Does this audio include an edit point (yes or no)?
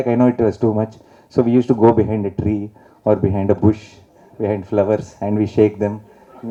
no